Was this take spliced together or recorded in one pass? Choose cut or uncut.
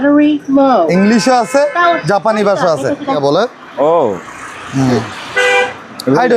cut